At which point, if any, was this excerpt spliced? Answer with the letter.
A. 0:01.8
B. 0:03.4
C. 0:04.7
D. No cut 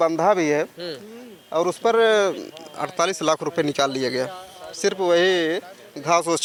D